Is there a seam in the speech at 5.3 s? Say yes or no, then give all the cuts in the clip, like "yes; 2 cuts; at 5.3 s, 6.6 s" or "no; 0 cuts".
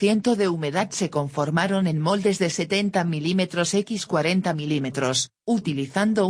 yes; 1 cut; at 5.3 s